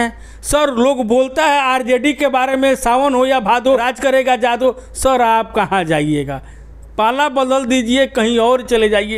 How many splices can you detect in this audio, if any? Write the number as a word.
one